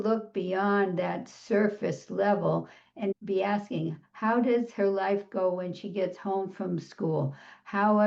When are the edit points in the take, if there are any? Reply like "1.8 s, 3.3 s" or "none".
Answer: 3.1 s